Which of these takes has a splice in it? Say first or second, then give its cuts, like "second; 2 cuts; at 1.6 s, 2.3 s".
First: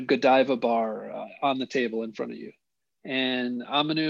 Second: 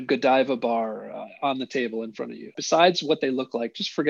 second; 1 cut; at 2.6 s